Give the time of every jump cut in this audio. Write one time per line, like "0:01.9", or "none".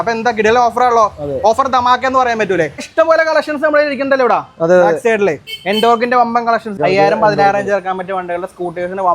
0:02.9
0:06.8